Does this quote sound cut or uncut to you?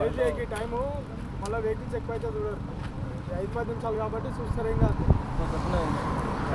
uncut